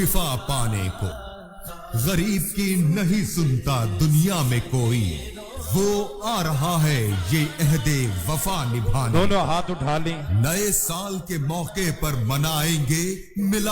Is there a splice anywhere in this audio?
yes; 1 cut; at 1.2 s

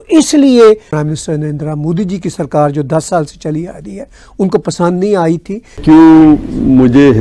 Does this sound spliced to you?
yes; 2 cuts; at 0.9 s, 5.8 s

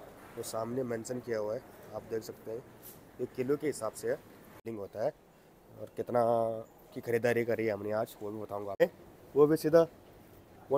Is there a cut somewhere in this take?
yes; 2 cuts; at 4.6 s, 8.8 s

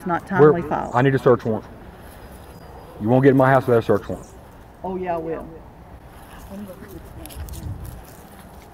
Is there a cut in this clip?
no; 0 cuts

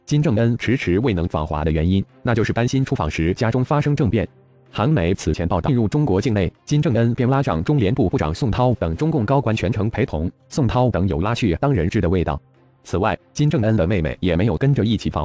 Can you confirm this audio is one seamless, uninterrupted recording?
yes; 0 cuts

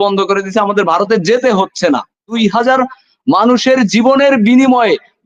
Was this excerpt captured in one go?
no; 1 cut; at 2.4 s

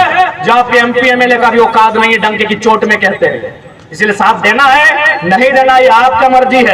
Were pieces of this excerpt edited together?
no; 0 cuts

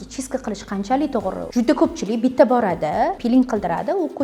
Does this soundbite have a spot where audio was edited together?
yes; 2 cuts; at 1.5 s, 3.2 s

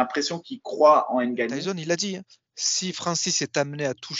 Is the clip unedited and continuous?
no; 1 cut; at 1.6 s

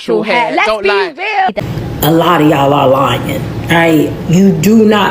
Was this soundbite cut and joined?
yes; 1 cut; at 1.6 s

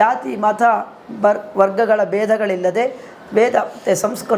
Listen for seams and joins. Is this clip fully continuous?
yes; 0 cuts

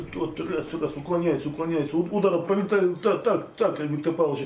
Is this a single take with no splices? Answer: yes; 0 cuts

